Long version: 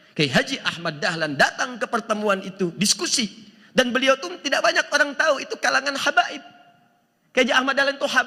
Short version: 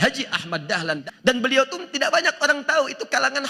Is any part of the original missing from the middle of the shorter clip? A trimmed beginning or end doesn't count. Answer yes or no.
yes